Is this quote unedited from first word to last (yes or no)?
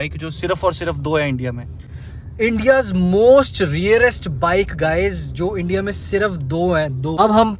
yes